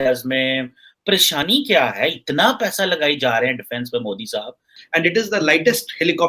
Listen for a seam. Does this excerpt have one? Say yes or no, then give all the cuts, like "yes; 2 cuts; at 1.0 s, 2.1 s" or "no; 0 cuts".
yes; 2 cuts; at 1.1 s, 4.7 s